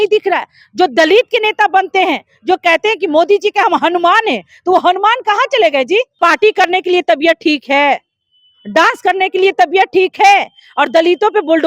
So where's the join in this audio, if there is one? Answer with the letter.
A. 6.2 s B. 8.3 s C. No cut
A